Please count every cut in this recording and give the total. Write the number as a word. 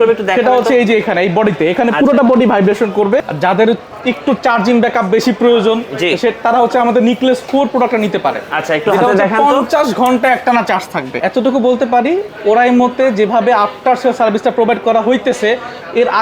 two